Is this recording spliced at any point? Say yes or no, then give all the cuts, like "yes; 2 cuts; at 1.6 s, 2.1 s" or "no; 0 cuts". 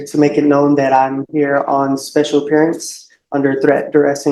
no; 0 cuts